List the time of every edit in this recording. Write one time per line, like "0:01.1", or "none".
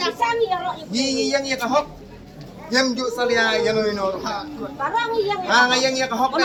none